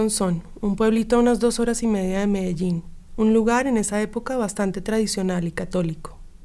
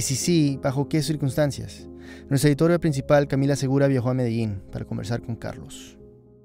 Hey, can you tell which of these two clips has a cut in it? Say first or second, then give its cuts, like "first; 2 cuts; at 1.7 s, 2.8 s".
second; 1 cut; at 4.6 s